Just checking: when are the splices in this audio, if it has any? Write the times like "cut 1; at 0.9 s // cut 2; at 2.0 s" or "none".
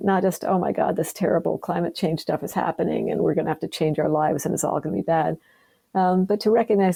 none